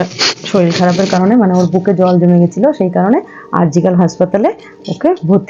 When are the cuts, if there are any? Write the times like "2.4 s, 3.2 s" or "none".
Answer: none